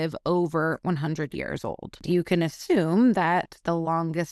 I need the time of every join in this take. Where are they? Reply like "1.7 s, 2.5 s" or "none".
2.0 s

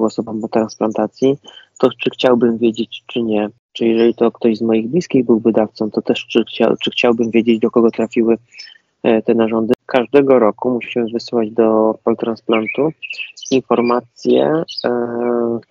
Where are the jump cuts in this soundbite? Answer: 3.6 s, 9.7 s

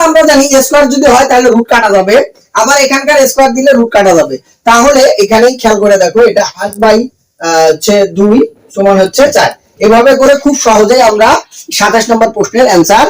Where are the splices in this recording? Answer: none

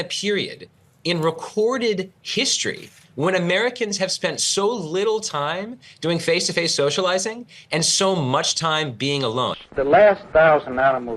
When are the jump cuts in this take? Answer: 9.6 s

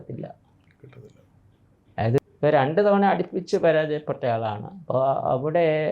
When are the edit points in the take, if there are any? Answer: 2.2 s

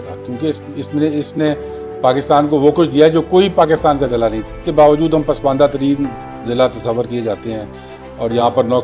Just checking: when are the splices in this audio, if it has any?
4.6 s

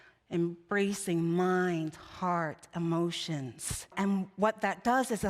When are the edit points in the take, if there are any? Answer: 3.9 s

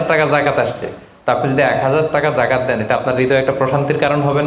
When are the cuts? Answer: none

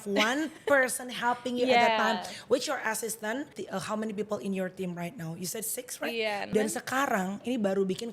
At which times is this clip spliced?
3.6 s, 6.4 s

